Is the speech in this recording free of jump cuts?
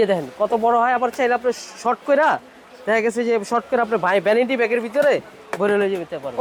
yes; 0 cuts

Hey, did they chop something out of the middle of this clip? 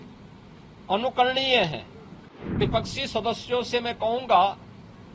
yes; 1 cut; at 2.6 s

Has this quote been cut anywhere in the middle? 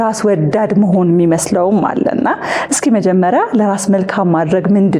no; 0 cuts

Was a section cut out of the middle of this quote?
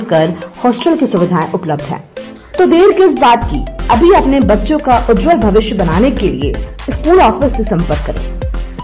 no; 0 cuts

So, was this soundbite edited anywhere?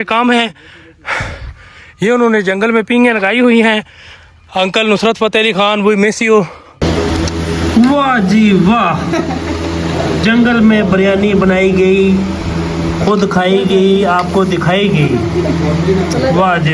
yes; 1 cut; at 6.7 s

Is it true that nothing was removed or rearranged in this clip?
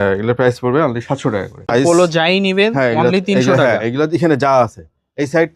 no; 1 cut; at 1.6 s

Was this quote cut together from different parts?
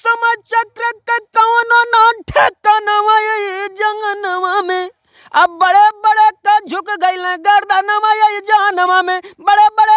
no; 0 cuts

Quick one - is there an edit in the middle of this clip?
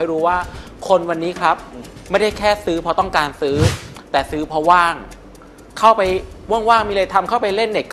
no; 0 cuts

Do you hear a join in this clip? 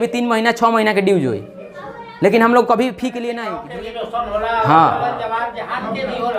yes; 1 cut; at 3.3 s

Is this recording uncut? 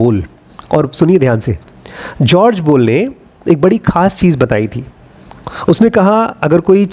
yes; 0 cuts

